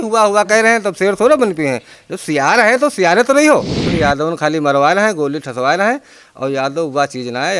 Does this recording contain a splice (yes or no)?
yes